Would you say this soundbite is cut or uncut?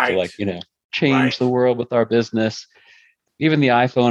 cut